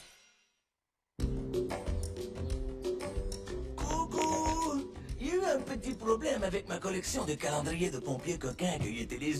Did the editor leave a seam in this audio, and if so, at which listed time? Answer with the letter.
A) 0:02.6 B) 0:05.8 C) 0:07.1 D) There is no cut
C